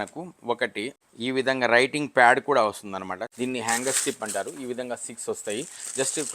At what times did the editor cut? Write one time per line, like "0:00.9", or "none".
0:01.0
0:03.3